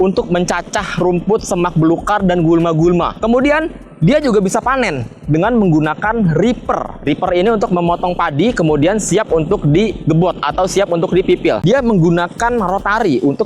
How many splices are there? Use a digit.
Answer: 1